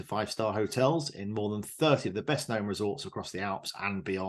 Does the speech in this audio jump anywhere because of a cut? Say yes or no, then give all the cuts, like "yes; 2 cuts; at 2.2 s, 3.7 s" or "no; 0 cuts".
no; 0 cuts